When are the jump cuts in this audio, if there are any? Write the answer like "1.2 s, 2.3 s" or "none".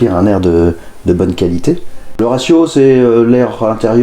2.1 s